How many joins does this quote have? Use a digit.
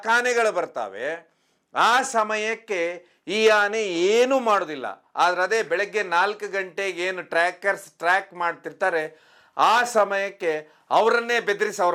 0